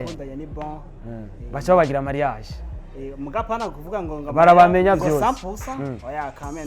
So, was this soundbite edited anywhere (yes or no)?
no